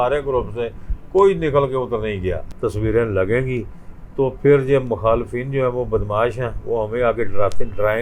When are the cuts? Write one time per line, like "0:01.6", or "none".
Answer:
0:02.5